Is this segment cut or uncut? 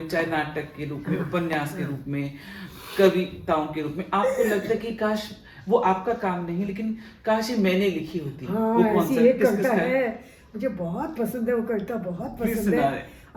uncut